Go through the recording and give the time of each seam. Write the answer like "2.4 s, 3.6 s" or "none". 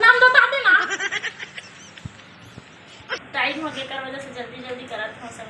3.1 s